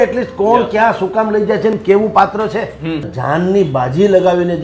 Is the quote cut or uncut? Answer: cut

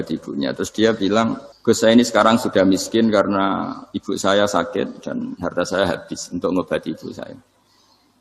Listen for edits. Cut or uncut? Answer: cut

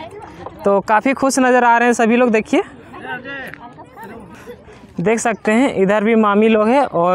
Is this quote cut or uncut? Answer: uncut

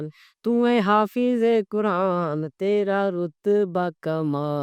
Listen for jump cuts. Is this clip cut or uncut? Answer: uncut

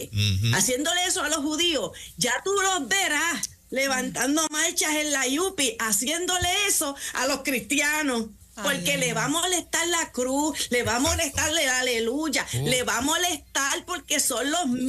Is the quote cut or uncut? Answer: uncut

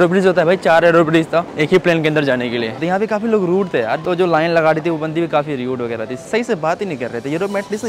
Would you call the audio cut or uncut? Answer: cut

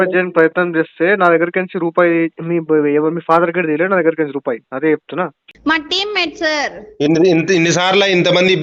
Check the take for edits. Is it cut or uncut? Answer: cut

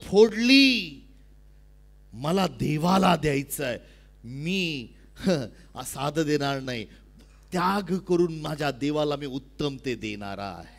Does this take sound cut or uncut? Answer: uncut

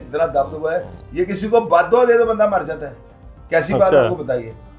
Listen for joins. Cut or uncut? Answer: uncut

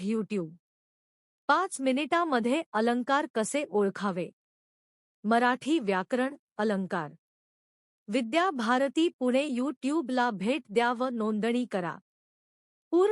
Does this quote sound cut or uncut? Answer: uncut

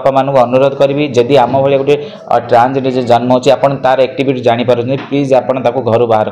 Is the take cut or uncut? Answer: uncut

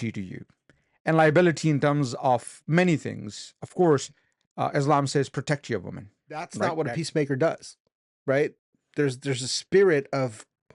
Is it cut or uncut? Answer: cut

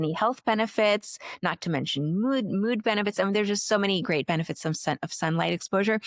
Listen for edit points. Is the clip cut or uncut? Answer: uncut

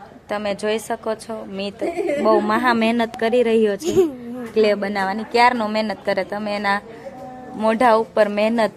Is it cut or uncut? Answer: uncut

